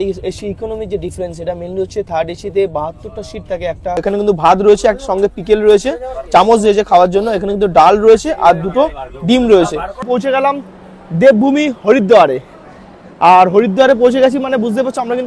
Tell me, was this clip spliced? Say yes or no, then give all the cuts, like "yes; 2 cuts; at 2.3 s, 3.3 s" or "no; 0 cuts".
yes; 2 cuts; at 4.0 s, 10.0 s